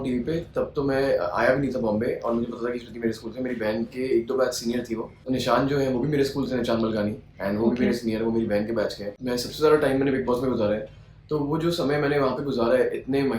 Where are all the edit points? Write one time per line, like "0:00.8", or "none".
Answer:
0:05.2
0:09.1